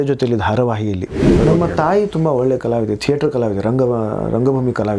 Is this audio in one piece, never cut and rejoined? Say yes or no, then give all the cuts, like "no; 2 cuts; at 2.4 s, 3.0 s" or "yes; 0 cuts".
no; 1 cut; at 1.2 s